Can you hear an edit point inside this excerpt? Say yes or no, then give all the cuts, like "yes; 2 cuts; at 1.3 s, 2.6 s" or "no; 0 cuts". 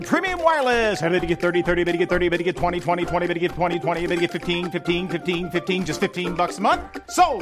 no; 0 cuts